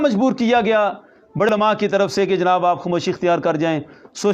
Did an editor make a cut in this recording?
yes; 1 cut; at 1.5 s

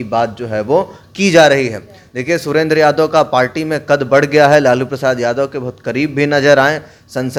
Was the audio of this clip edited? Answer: no; 0 cuts

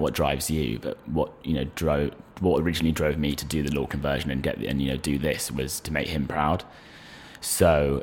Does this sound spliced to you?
no; 0 cuts

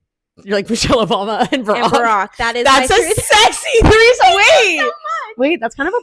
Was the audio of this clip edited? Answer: no; 0 cuts

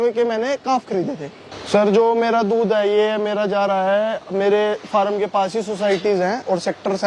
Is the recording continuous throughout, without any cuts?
no; 1 cut; at 1.5 s

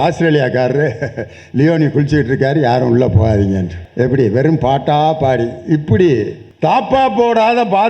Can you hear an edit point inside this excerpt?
yes; 2 cuts; at 3.8 s, 6.4 s

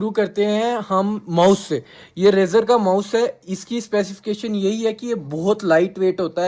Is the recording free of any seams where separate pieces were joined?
yes; 0 cuts

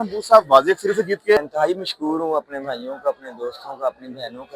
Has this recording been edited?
yes; 1 cut; at 1.4 s

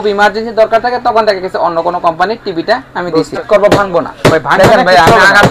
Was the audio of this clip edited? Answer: yes; 1 cut; at 3.4 s

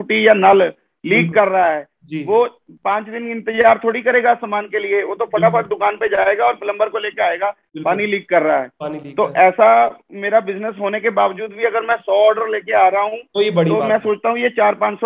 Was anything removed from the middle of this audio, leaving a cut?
no; 0 cuts

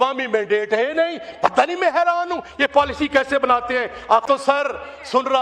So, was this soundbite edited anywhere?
yes; 1 cut; at 4.2 s

